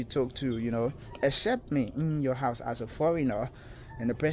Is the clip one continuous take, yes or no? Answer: yes